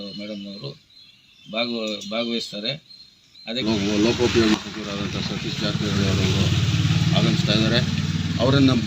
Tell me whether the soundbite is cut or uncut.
cut